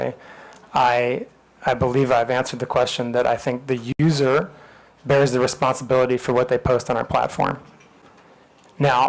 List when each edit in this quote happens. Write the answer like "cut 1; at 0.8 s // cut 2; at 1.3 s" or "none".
none